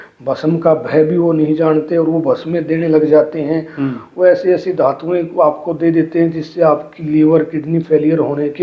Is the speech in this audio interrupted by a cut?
no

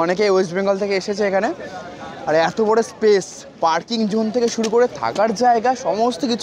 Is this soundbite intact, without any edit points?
yes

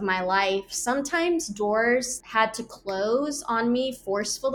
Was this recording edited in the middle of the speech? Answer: yes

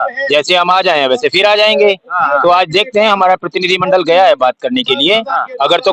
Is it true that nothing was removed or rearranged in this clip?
yes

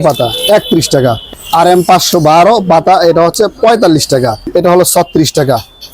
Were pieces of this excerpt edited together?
yes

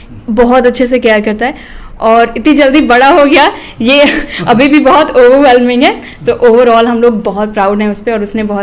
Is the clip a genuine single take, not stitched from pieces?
yes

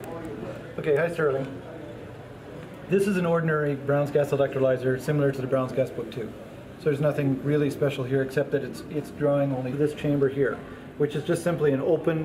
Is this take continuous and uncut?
yes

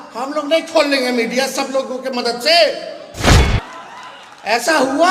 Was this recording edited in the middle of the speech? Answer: yes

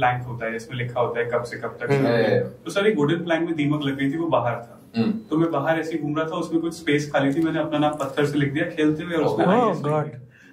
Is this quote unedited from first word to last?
yes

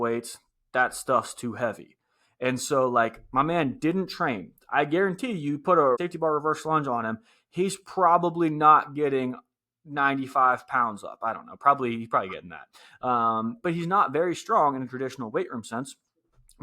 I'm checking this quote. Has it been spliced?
yes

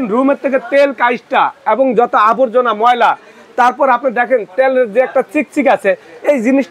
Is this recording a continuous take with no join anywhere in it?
yes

